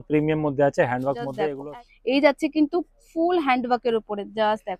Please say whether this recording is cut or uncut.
cut